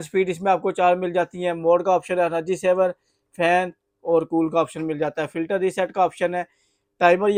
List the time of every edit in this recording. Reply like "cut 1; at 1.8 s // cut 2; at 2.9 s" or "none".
none